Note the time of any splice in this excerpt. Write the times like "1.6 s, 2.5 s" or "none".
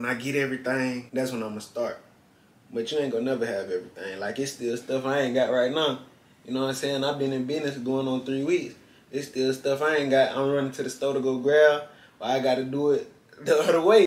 none